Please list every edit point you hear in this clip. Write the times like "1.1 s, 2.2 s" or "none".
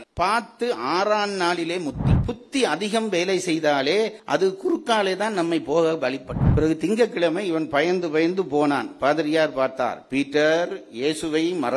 2.2 s, 6.4 s